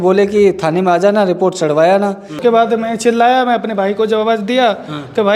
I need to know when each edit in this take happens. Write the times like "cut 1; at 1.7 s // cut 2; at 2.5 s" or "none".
cut 1; at 2.4 s